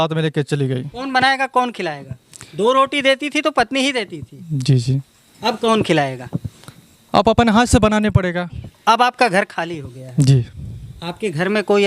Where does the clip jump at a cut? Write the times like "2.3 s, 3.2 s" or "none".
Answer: 0.9 s, 8.7 s